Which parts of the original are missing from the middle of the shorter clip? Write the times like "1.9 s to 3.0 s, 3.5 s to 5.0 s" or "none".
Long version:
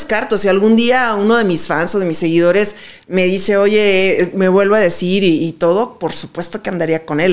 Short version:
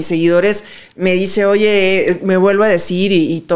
none